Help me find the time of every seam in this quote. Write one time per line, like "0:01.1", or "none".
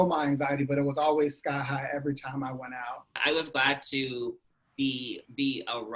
0:03.2